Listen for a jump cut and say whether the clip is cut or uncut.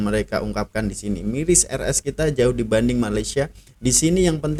uncut